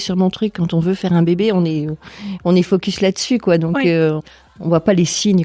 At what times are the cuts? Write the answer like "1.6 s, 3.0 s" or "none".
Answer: 4.2 s